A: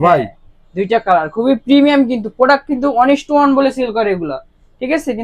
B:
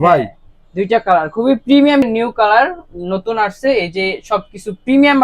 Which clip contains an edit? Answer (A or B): B